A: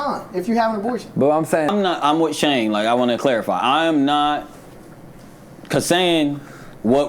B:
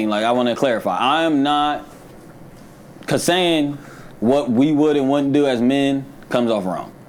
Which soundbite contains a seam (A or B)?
A